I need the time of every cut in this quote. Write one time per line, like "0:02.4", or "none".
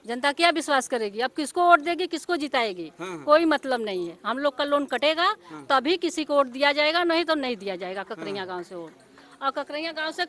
none